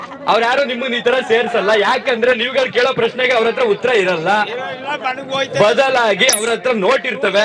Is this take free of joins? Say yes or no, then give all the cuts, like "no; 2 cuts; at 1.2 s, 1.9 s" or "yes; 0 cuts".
yes; 0 cuts